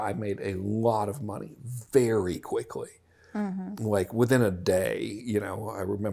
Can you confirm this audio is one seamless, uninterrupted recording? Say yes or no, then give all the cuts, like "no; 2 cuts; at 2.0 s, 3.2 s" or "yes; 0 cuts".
yes; 0 cuts